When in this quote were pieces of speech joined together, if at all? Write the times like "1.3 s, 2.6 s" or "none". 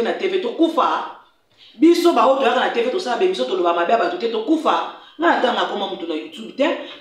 none